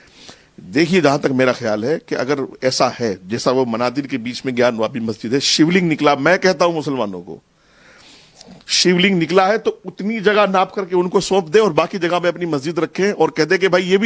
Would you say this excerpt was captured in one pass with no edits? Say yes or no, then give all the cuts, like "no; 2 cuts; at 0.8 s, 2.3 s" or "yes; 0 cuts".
yes; 0 cuts